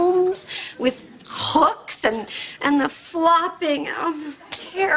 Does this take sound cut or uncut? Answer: cut